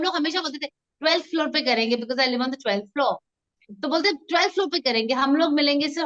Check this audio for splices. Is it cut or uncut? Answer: uncut